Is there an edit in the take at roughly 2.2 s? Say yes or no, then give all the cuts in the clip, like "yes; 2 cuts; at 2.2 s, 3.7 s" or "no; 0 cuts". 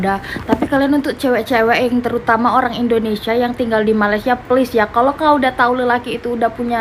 no; 0 cuts